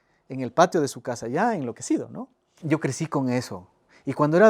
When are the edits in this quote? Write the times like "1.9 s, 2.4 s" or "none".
2.6 s